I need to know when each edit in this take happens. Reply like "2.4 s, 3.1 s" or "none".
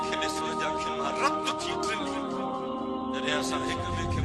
none